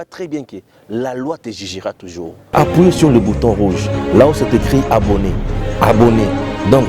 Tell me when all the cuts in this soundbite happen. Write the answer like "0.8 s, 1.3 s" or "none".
2.4 s